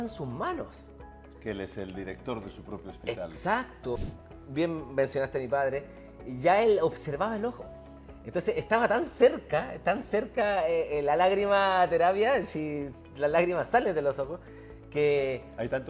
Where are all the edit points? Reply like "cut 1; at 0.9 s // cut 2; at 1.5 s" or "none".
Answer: cut 1; at 4.0 s